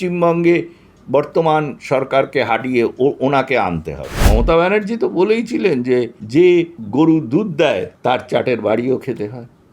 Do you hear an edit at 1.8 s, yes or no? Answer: no